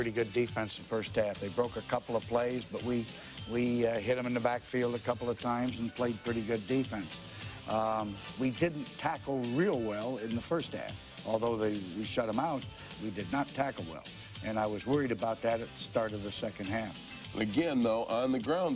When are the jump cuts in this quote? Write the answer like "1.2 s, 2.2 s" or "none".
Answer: none